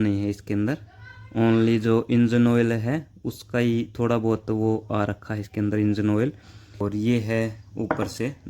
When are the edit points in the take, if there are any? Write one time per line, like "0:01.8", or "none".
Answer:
0:06.8